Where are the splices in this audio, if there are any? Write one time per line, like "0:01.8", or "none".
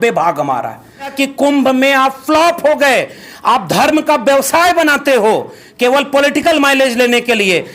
0:01.1